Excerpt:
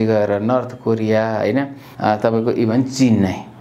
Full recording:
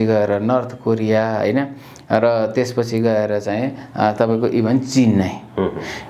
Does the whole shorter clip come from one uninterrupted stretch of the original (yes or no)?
no